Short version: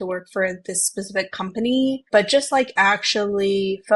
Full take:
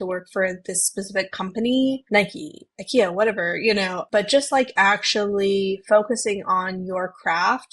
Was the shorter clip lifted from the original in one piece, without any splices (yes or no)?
no